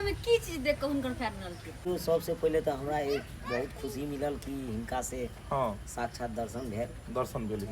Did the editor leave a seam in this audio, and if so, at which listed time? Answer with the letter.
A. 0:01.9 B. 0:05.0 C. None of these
A